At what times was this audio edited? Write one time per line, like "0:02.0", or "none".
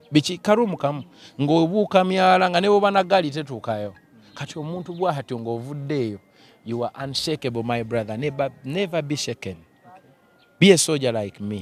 none